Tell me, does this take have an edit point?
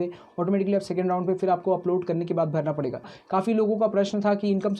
yes; 1 cut; at 3.2 s

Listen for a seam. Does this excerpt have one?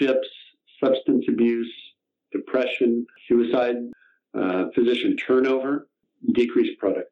yes; 3 cuts; at 3.1 s, 3.9 s, 6.1 s

